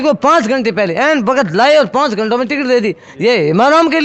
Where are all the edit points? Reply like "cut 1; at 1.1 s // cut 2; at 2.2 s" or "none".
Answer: none